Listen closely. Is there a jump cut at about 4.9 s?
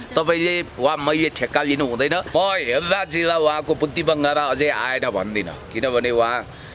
no; 1 cut; at 2.3 s

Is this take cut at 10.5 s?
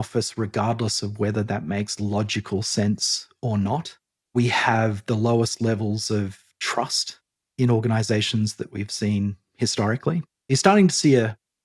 yes; 1 cut; at 10.5 s

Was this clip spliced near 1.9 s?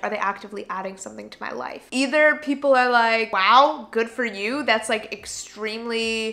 yes; 1 cut; at 1.9 s

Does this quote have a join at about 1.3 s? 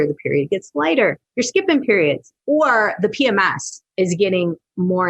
yes; 2 cuts; at 1.3 s, 2.3 s

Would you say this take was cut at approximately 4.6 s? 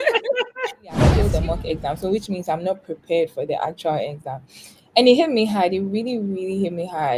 no; 1 cut; at 1.2 s

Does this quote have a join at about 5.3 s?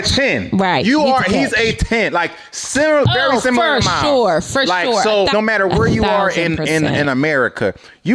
yes; 1 cut; at 5.3 s

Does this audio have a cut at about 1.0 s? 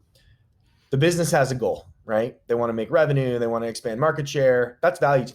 no; 0 cuts

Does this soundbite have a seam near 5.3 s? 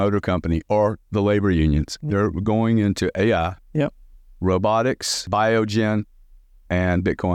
yes; 1 cut; at 5.3 s

